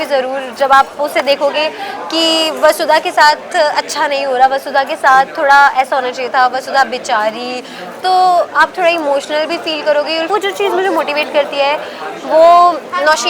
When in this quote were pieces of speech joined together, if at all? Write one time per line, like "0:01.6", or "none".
0:10.3